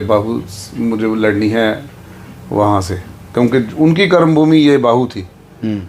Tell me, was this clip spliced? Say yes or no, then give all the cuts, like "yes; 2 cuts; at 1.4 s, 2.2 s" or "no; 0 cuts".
no; 0 cuts